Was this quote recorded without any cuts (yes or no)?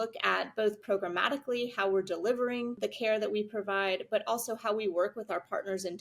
no